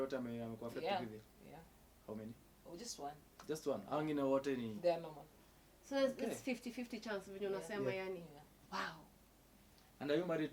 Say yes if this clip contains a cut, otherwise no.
no